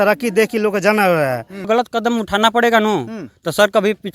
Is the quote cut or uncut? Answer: cut